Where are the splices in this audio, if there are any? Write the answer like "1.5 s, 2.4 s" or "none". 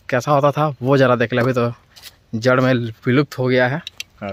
none